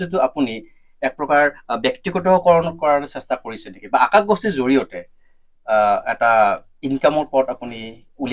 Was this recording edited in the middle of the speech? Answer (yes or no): no